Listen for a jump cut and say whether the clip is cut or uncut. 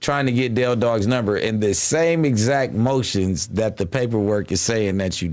uncut